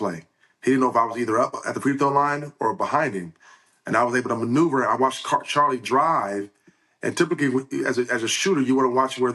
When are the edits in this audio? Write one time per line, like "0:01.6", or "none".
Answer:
none